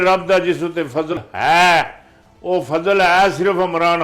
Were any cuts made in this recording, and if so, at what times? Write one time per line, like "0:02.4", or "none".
0:01.2